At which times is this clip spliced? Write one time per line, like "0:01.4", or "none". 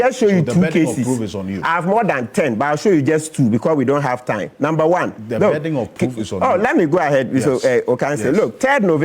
0:02.1